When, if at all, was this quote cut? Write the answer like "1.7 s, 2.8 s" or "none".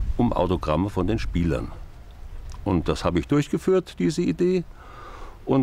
none